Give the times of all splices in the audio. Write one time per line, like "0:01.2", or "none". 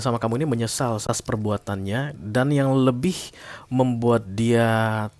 0:01.0